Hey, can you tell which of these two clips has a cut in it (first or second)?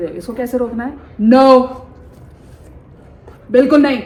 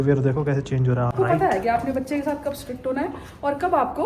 second